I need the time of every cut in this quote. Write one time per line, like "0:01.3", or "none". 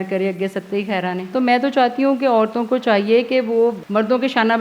0:01.3
0:03.8